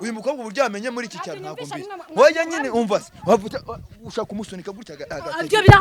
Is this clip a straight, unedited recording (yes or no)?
yes